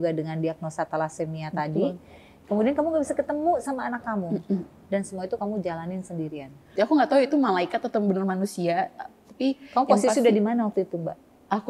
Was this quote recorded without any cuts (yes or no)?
no